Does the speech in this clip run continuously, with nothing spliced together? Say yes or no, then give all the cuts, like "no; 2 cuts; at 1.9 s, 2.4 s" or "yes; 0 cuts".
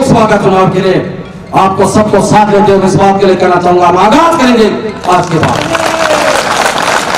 yes; 0 cuts